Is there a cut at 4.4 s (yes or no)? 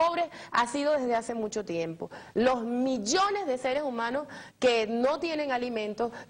no